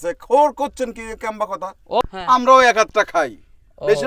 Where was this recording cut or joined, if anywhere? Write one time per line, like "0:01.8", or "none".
0:02.0